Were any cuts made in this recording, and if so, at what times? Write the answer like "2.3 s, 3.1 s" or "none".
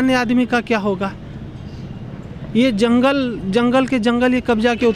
none